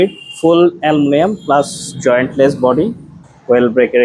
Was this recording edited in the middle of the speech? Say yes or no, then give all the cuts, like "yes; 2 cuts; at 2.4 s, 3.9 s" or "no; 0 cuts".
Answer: no; 0 cuts